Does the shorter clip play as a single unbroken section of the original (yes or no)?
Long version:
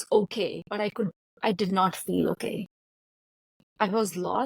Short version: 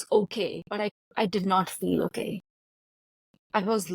no